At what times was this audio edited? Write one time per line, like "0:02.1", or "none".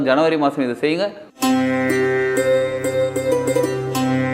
0:01.2